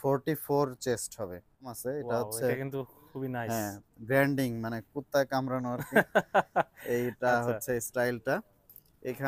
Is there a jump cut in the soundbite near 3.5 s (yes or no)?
no